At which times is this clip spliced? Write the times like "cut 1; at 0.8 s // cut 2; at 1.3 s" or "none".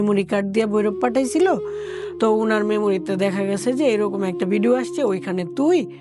none